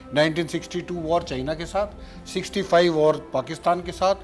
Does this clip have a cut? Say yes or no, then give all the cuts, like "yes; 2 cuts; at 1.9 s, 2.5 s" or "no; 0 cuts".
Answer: no; 0 cuts